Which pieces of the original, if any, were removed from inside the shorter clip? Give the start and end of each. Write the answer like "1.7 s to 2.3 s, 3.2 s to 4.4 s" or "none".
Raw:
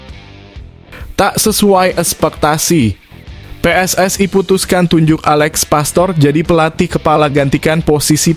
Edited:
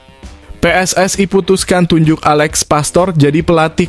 none